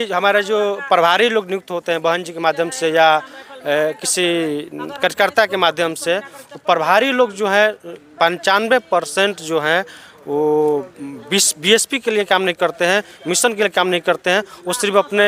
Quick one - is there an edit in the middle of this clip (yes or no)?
no